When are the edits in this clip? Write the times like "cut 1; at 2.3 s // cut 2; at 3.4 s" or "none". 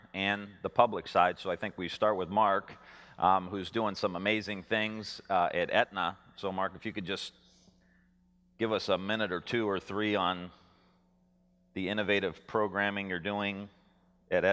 cut 1; at 11.2 s